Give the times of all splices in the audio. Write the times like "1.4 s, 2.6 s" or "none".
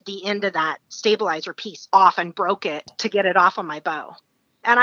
2.9 s

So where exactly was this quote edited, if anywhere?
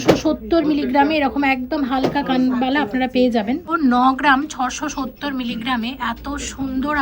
3.7 s

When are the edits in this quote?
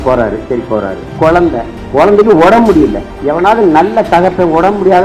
1.0 s, 1.8 s, 3.1 s

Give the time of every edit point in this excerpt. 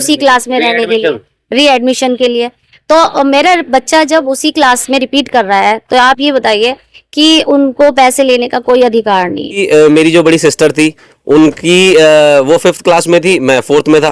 9.6 s

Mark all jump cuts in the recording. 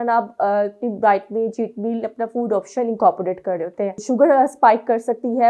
4.0 s

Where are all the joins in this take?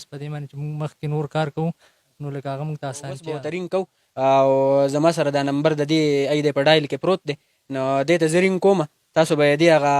3.5 s

